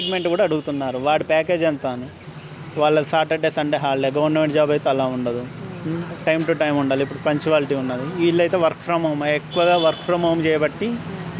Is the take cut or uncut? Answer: cut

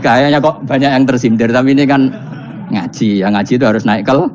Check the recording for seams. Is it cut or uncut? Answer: uncut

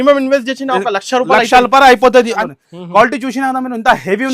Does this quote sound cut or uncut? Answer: cut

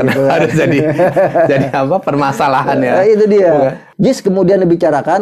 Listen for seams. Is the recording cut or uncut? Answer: cut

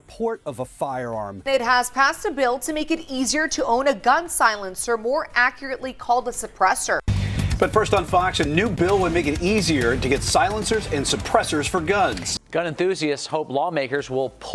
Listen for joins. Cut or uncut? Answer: cut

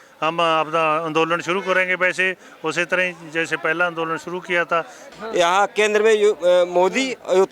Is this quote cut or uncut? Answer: cut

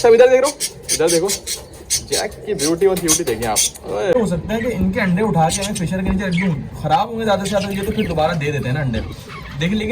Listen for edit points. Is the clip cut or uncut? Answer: cut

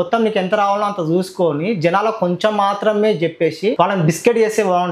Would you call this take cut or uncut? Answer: cut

